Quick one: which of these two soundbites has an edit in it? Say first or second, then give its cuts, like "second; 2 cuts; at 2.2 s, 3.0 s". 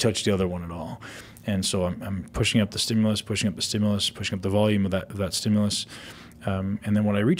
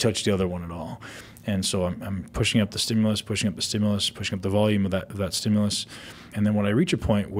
second; 1 cut; at 6.3 s